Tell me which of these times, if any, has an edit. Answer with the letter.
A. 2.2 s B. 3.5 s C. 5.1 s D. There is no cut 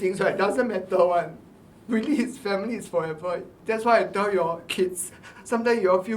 B